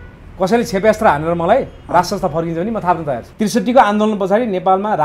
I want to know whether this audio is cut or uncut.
cut